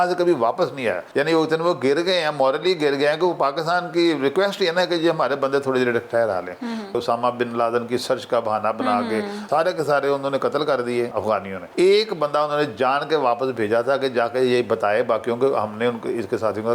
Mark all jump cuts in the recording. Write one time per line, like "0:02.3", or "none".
0:01.0
0:06.9
0:09.4
0:11.2